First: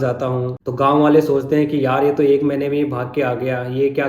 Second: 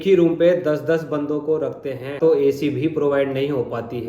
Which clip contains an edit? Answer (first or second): second